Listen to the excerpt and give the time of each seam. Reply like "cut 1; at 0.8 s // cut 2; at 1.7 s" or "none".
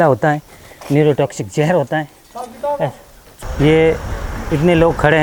cut 1; at 3.3 s